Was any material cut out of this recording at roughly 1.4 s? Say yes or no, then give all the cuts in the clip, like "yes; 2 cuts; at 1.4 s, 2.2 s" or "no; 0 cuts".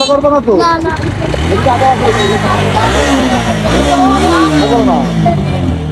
no; 0 cuts